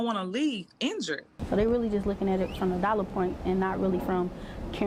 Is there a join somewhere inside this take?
no; 0 cuts

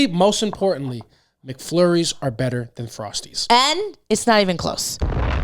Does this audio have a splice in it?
yes; 1 cut; at 3.4 s

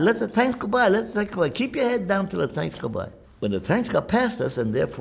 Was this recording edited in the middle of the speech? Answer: yes; 1 cut; at 3.2 s

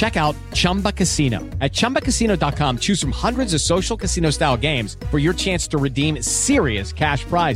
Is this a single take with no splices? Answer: yes; 0 cuts

